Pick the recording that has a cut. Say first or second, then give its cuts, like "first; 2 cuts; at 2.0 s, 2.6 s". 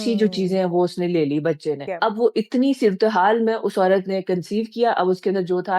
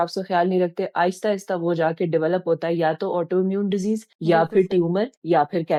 first; 1 cut; at 1.9 s